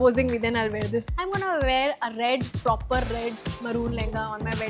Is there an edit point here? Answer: yes; 1 cut; at 1.1 s

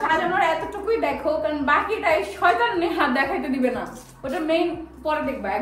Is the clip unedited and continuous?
yes; 0 cuts

